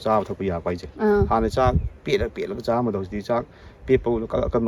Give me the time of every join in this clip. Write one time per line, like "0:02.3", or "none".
none